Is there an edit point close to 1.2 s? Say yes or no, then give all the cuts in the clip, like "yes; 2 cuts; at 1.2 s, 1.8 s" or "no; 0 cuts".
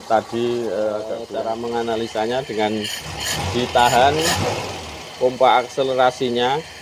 yes; 1 cut; at 1.2 s